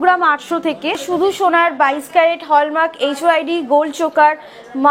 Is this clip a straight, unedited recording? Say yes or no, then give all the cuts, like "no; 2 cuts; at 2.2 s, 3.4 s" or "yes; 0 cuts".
no; 1 cut; at 1.0 s